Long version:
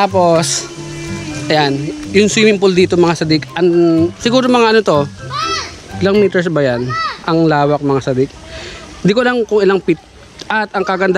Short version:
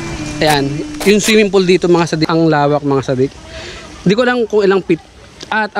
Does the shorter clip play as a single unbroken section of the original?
no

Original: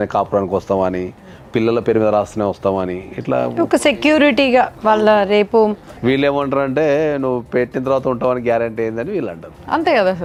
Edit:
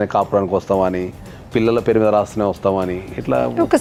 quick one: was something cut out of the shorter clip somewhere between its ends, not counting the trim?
no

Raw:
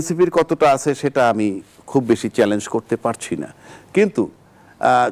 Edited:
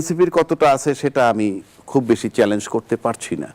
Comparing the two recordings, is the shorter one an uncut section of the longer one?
yes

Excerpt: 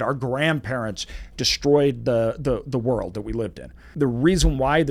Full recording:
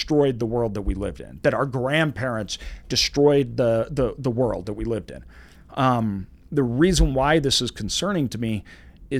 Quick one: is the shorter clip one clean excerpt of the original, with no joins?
no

